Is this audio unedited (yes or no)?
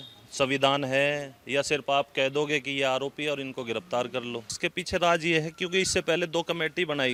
yes